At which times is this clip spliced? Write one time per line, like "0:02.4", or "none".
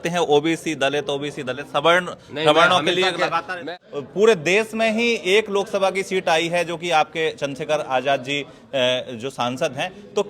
0:03.6